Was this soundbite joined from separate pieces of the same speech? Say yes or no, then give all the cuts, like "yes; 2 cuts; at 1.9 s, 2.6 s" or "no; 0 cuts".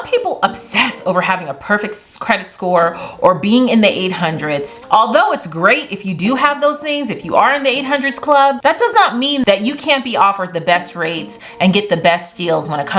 yes; 2 cuts; at 4.7 s, 9.4 s